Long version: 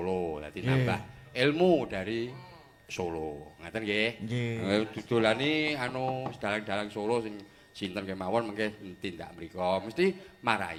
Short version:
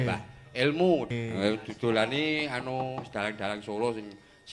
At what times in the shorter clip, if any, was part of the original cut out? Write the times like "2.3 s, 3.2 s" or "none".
1.1 s